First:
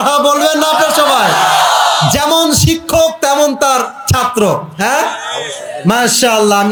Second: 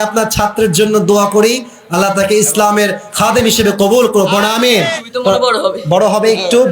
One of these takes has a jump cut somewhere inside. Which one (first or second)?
second